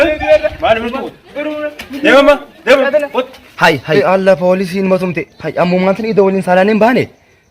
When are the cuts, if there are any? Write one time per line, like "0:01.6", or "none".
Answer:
0:04.0